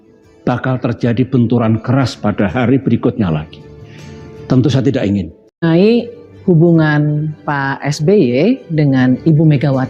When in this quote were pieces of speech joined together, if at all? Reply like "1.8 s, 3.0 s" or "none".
5.6 s